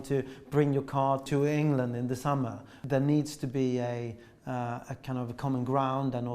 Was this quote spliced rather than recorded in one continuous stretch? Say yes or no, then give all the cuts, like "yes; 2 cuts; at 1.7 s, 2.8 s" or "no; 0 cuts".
yes; 2 cuts; at 1.3 s, 2.8 s